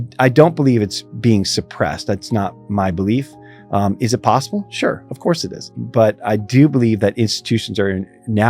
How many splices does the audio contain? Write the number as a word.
one